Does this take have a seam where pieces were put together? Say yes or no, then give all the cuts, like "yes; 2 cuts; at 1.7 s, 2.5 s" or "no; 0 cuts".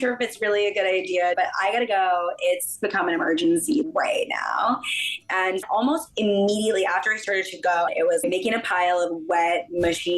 yes; 4 cuts; at 1.3 s, 3.8 s, 5.6 s, 8.1 s